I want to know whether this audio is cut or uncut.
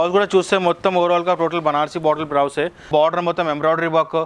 cut